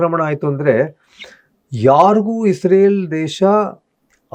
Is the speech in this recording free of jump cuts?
yes; 0 cuts

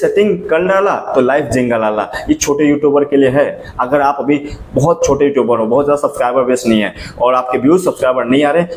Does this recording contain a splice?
no; 0 cuts

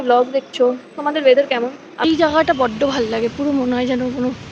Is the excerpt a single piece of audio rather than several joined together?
no; 1 cut; at 2.0 s

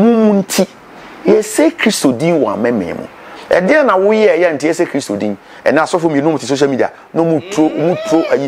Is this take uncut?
yes; 0 cuts

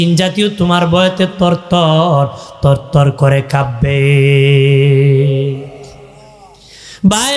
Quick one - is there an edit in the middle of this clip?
no; 0 cuts

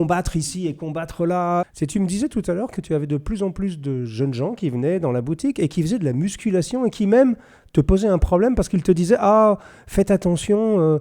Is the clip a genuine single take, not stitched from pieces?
no; 1 cut; at 1.7 s

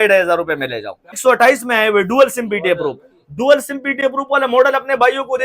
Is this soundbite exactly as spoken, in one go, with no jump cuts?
no; 1 cut; at 1.1 s

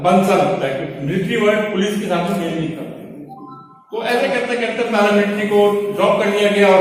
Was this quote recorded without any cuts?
yes; 0 cuts

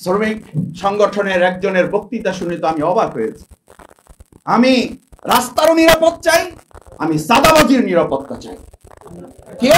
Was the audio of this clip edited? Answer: no; 0 cuts

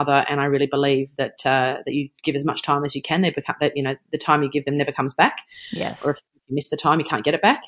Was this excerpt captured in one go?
yes; 0 cuts

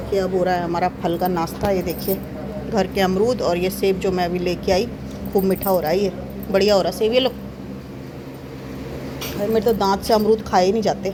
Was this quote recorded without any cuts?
yes; 0 cuts

